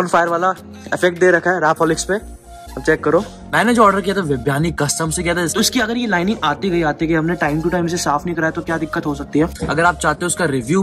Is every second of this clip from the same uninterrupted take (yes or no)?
no